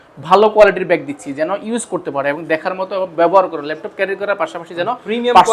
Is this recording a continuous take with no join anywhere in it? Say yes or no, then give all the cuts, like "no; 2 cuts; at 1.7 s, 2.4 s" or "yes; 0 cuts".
yes; 0 cuts